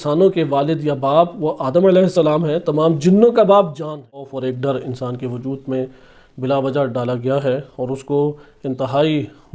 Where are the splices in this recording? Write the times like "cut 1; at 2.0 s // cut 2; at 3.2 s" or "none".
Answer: cut 1; at 4.4 s